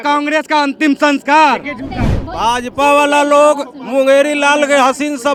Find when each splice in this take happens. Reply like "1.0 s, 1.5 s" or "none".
none